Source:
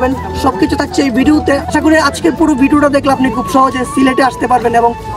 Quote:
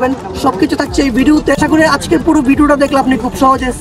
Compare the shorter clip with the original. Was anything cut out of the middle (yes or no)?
yes